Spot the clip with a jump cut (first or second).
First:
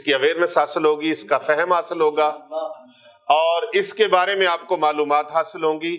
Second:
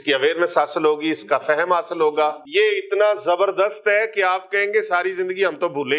second